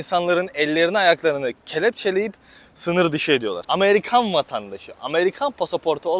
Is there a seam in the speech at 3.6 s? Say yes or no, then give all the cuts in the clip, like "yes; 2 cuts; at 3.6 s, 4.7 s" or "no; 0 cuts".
yes; 1 cut; at 3.6 s